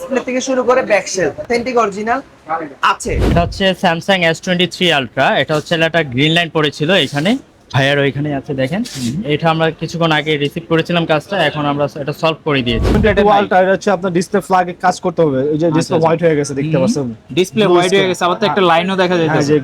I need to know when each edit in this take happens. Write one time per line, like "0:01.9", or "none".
0:01.5
0:03.3
0:13.0